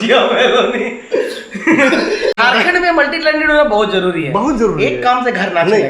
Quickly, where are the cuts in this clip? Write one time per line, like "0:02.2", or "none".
0:02.3